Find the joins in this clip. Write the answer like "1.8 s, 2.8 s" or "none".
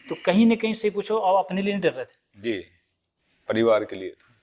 none